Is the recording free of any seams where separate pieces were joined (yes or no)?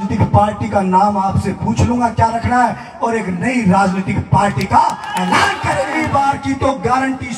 no